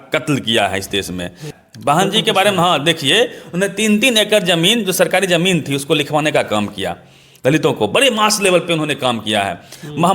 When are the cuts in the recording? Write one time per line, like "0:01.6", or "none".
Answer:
0:01.5